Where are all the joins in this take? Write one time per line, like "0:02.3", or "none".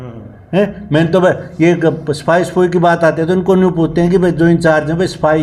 none